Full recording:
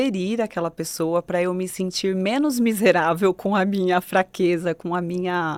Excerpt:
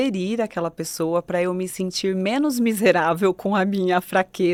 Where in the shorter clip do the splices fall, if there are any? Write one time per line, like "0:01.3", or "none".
none